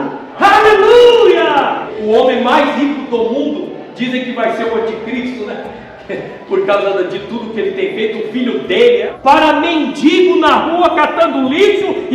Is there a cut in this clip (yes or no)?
yes